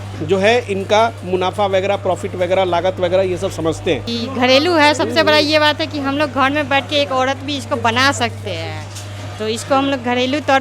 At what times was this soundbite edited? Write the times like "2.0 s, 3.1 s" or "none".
4.1 s